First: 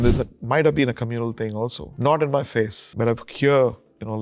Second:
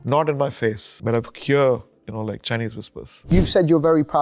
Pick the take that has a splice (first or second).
second